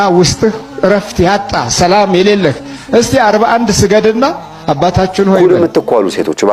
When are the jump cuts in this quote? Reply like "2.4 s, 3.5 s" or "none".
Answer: 5.4 s